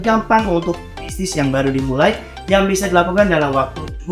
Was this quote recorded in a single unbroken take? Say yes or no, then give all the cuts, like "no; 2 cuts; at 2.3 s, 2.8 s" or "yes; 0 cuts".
yes; 0 cuts